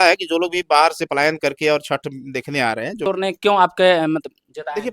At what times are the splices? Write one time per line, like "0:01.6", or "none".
0:03.0